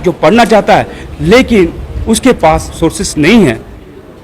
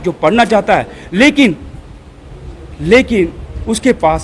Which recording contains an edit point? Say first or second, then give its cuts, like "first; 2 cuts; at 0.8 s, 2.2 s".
first; 2 cuts; at 1.0 s, 2.7 s